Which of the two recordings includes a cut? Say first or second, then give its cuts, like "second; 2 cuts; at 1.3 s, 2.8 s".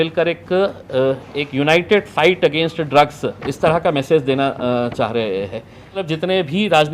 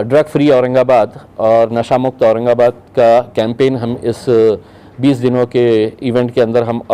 first; 1 cut; at 6.0 s